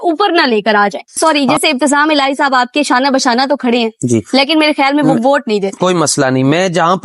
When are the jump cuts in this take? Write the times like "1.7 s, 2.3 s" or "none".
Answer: 1.2 s